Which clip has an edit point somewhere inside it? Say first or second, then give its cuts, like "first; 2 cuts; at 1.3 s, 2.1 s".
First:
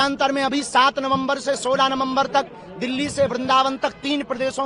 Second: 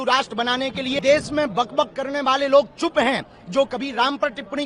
second; 1 cut; at 1.0 s